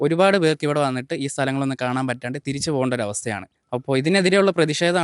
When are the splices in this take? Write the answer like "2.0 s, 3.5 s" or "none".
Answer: 3.5 s